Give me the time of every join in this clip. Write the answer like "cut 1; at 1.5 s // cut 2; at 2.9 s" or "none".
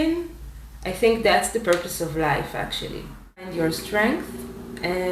cut 1; at 3.5 s